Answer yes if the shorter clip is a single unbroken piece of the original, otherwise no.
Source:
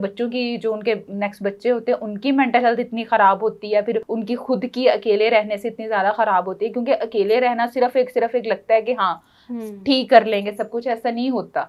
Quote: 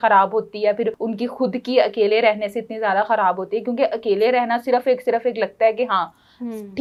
yes